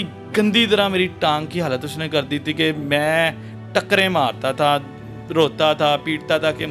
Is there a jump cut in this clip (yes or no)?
no